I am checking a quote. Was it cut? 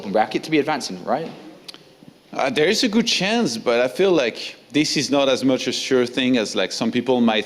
no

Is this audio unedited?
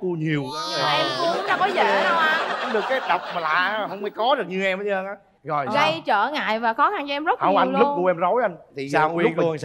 yes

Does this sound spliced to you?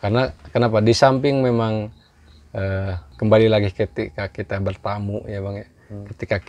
yes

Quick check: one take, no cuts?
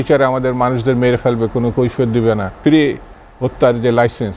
no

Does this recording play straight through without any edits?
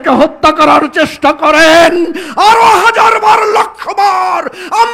yes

